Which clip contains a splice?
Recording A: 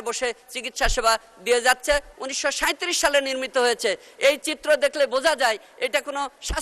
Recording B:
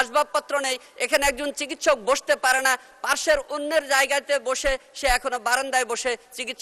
A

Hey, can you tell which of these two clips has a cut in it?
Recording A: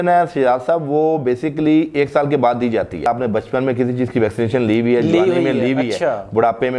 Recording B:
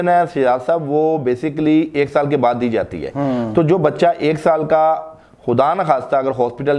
A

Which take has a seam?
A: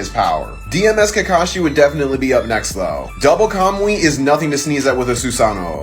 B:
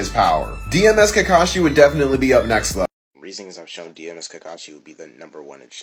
A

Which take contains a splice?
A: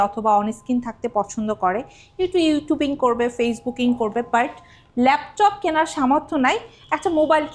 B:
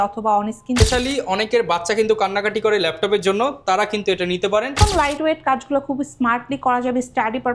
B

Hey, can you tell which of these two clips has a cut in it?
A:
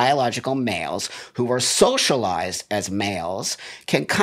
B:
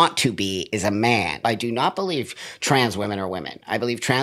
B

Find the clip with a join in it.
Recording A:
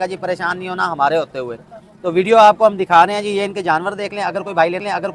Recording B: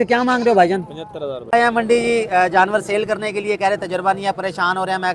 B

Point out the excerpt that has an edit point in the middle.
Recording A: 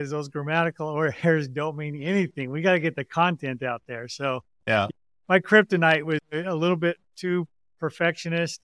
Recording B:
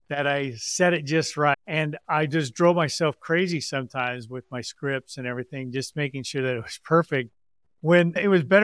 B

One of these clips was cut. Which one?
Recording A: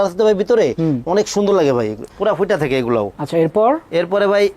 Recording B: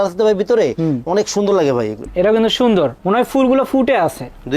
B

